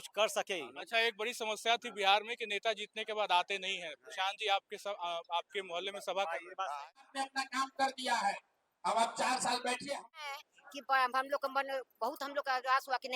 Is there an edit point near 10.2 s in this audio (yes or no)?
yes